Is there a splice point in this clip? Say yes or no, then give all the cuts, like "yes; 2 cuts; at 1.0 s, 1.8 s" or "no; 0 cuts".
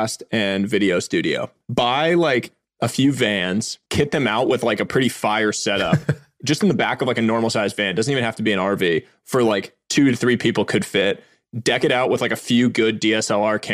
yes; 2 cuts; at 1.5 s, 3.8 s